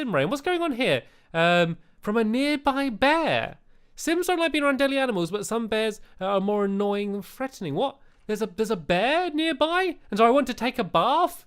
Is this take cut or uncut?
cut